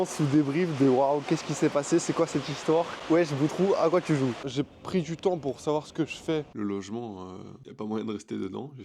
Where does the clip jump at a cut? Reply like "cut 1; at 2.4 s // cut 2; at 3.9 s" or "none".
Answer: cut 1; at 4.4 s // cut 2; at 6.5 s